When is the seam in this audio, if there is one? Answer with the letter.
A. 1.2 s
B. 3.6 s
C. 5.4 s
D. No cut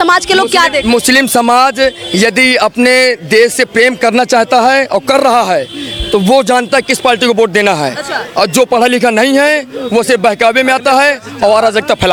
D